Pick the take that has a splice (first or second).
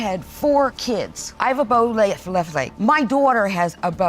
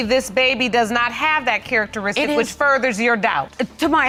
first